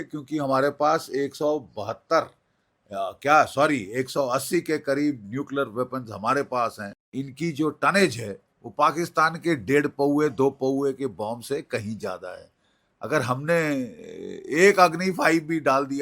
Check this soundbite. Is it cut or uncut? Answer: cut